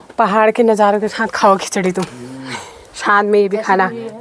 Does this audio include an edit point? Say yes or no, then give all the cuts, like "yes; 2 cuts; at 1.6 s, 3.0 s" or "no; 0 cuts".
no; 0 cuts